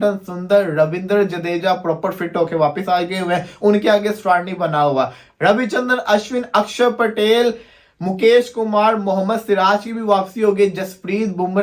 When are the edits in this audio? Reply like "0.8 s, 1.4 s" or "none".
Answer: none